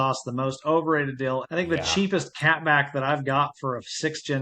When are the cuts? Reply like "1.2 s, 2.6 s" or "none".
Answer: 1.5 s